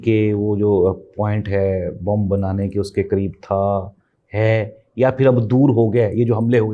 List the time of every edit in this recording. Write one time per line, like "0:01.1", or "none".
none